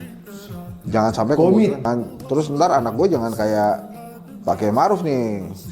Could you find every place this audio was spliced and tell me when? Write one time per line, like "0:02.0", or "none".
0:01.8